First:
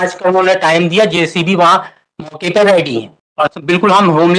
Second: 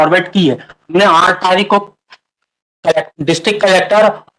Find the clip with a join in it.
first; 1 cut; at 3.2 s

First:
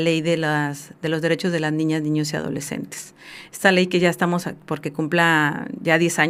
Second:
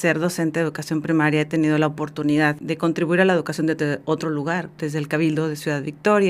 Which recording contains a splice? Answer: second; 2 cuts; at 2.6 s, 4.7 s

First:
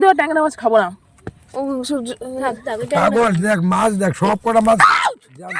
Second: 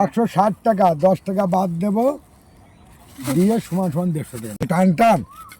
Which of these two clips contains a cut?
second; 1 cut; at 4.6 s

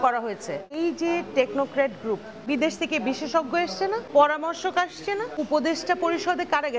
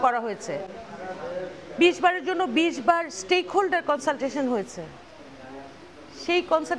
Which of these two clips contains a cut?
first; 4 cuts; at 0.8 s, 2.3 s, 4.1 s, 5.4 s

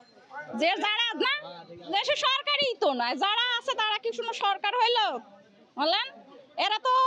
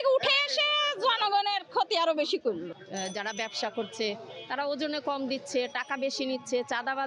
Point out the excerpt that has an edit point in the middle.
second; 1 cut; at 2.7 s

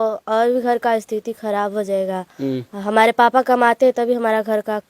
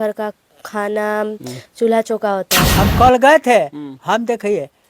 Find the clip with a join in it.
second; 1 cut; at 2.6 s

